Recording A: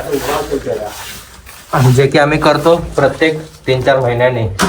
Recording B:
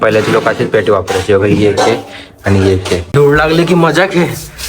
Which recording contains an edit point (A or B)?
B